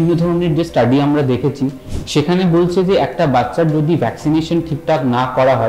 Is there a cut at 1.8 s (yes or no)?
no